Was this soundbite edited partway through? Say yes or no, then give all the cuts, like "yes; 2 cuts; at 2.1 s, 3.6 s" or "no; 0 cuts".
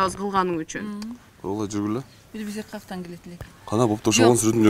no; 0 cuts